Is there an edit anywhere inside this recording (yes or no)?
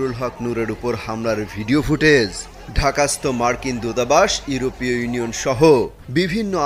no